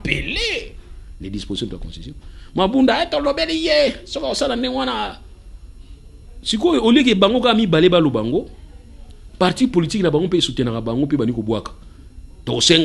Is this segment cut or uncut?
uncut